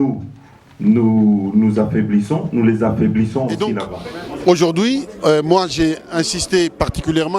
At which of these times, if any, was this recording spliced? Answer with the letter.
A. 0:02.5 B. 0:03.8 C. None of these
B